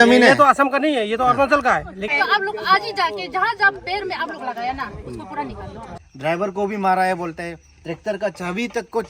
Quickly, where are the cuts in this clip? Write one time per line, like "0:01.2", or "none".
0:02.1
0:05.9

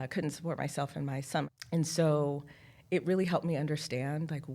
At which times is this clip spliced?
0:01.5

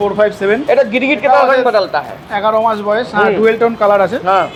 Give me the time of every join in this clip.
none

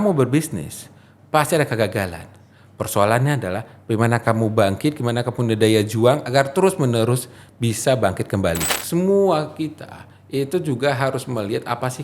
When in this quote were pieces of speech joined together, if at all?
0:08.7

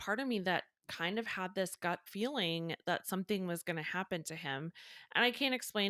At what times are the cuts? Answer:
none

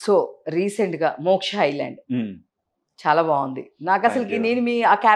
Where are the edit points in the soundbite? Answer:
none

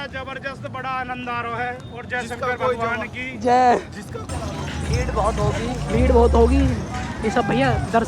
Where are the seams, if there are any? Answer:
0:04.3

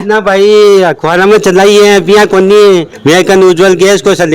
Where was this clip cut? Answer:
0:02.9

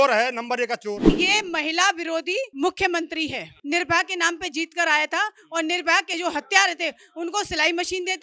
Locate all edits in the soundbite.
0:01.1
0:02.5
0:03.5
0:06.1

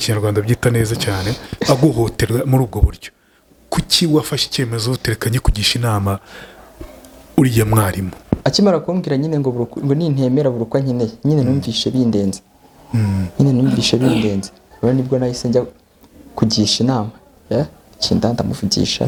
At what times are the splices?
none

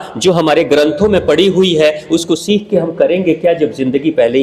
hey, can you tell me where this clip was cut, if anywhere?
none

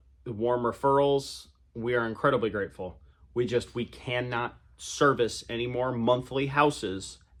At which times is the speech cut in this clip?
none

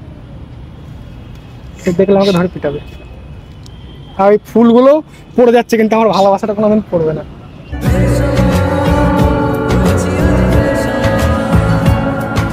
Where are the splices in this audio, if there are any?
none

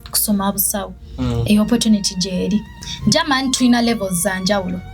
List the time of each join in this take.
0:02.7

